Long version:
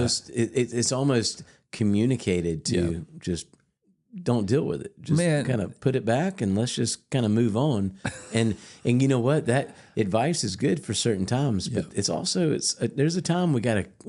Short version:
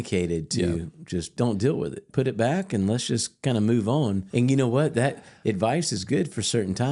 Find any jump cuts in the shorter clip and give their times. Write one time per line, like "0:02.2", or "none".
0:01.3
0:02.0
0:04.2